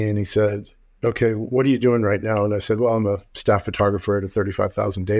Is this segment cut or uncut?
uncut